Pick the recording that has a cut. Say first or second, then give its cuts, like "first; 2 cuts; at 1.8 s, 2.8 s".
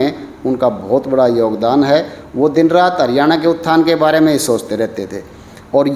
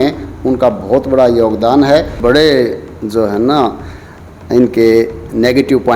second; 1 cut; at 2.1 s